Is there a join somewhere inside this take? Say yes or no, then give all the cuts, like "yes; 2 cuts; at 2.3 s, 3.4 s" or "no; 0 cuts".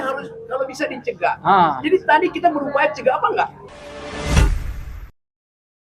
yes; 1 cut; at 3.6 s